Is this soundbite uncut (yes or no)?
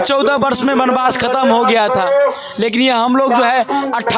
yes